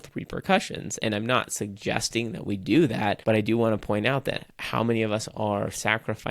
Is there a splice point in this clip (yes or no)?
yes